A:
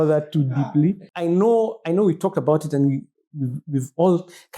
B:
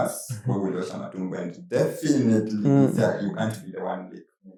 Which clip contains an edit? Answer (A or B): A